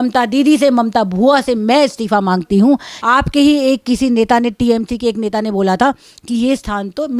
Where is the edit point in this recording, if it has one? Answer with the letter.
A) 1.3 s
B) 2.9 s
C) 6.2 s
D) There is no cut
B